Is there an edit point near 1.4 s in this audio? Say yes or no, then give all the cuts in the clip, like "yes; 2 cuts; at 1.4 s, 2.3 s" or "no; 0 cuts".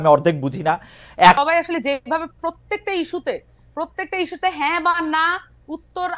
yes; 1 cut; at 1.4 s